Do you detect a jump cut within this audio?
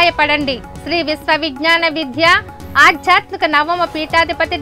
no; 0 cuts

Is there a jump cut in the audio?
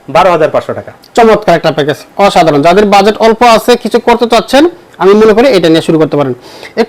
no; 0 cuts

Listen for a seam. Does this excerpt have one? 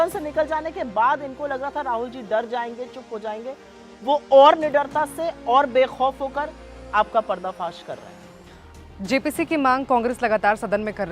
no; 0 cuts

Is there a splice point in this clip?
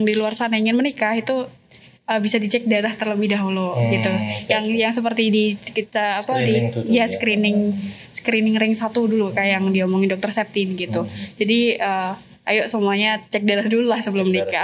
no; 0 cuts

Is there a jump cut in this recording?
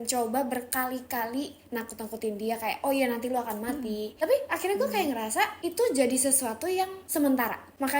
yes; 1 cut; at 4.1 s

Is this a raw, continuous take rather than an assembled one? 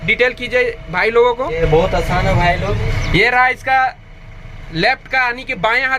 no; 2 cuts; at 1.5 s, 2.8 s

